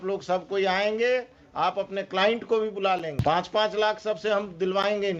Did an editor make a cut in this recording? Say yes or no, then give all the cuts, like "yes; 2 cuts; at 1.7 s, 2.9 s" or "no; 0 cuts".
yes; 1 cut; at 3.1 s